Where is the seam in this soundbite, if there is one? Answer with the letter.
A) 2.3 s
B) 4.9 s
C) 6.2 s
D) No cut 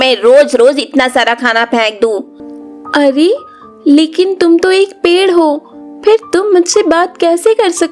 A